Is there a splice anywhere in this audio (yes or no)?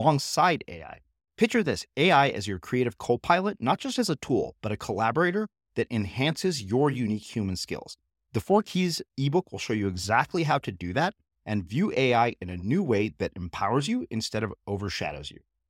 no